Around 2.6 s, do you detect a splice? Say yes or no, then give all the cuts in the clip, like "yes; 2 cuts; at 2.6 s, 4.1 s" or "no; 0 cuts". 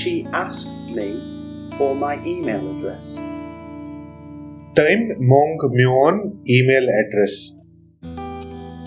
yes; 2 cuts; at 2.6 s, 4.7 s